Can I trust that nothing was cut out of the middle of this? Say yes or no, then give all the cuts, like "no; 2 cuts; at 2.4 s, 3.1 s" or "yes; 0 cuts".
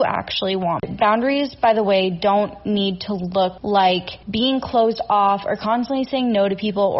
no; 3 cuts; at 0.8 s, 3.6 s, 4.2 s